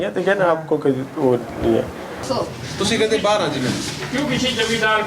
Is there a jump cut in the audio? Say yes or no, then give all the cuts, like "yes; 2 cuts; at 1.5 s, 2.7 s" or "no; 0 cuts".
yes; 1 cut; at 2.2 s